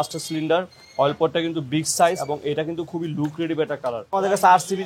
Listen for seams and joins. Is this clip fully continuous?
no; 2 cuts; at 2.2 s, 4.0 s

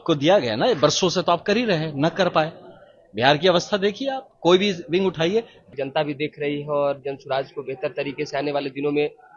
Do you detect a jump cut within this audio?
yes; 1 cut; at 5.6 s

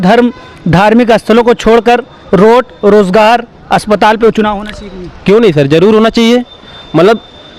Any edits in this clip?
no; 0 cuts

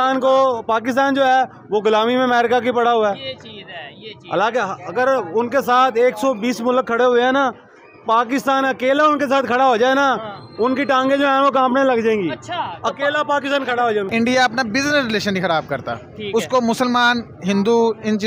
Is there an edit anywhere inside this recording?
yes; 1 cut; at 14.1 s

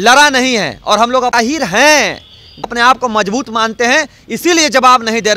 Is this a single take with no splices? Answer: no; 2 cuts; at 1.3 s, 2.7 s

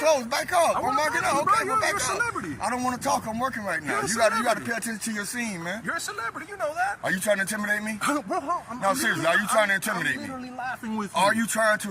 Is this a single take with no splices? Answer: no; 1 cut; at 7.0 s

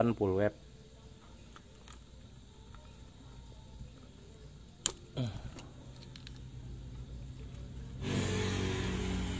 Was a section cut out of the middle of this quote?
no; 0 cuts

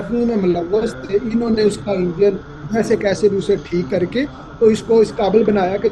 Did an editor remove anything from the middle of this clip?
no; 0 cuts

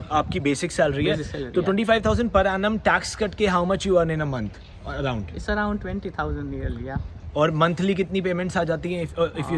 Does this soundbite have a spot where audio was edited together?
no; 0 cuts

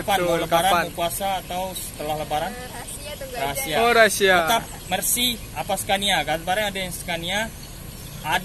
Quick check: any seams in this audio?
no; 0 cuts

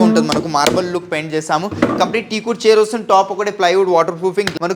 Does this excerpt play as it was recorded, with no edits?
yes; 0 cuts

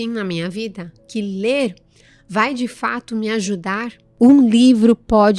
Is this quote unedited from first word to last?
no; 1 cut; at 4.0 s

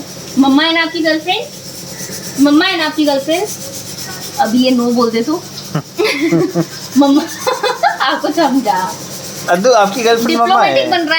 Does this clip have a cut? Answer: no; 0 cuts

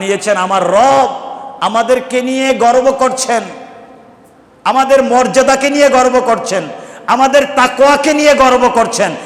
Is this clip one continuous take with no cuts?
yes; 0 cuts

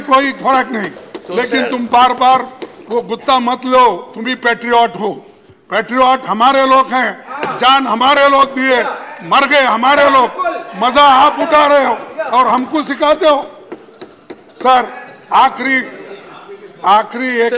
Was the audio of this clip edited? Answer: no; 0 cuts

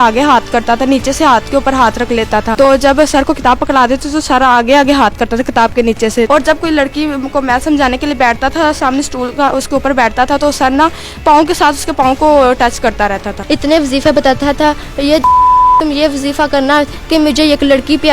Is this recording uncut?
no; 3 cuts; at 2.5 s, 6.3 s, 13.4 s

